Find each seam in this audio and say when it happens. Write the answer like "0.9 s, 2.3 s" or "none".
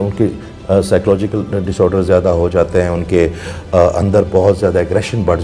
none